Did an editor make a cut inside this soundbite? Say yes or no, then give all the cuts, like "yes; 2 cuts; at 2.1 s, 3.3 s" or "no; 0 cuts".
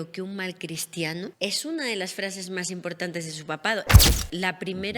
yes; 2 cuts; at 1.3 s, 4.1 s